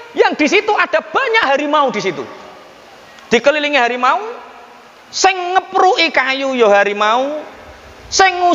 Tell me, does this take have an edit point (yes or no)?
no